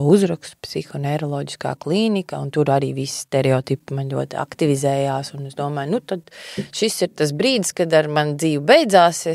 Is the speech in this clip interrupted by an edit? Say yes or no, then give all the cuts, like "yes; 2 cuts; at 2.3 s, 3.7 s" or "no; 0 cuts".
no; 0 cuts